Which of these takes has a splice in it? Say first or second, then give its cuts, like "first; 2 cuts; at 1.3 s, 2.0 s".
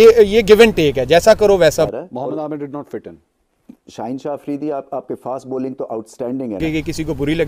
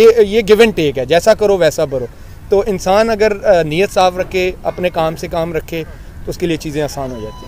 first; 2 cuts; at 1.9 s, 6.6 s